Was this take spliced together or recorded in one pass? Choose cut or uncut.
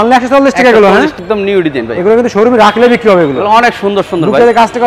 cut